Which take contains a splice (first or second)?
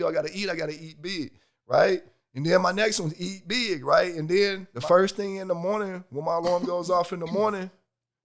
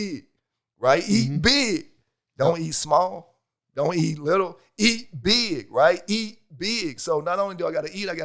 first